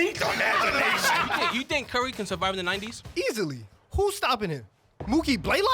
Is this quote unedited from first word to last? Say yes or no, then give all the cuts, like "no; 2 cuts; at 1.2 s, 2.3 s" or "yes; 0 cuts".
no; 2 cuts; at 1.5 s, 3.4 s